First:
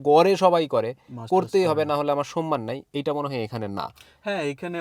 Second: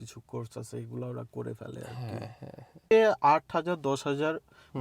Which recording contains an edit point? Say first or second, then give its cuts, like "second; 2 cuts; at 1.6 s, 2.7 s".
second; 1 cut; at 2.9 s